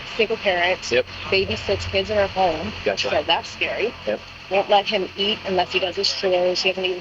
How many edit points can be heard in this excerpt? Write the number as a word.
two